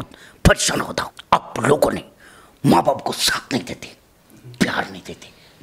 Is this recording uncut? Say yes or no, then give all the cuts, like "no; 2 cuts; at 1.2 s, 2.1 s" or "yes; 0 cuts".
no; 1 cut; at 1.1 s